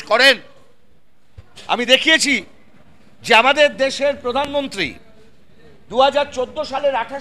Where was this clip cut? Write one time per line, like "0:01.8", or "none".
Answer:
none